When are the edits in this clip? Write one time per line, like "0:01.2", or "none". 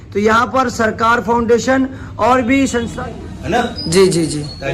0:02.9